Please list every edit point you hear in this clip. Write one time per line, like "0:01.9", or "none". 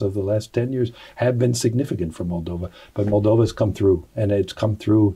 none